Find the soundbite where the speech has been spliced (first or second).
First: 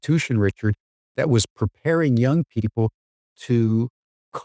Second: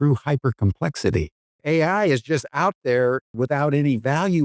second